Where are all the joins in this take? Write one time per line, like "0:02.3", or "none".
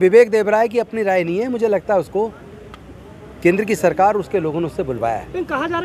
none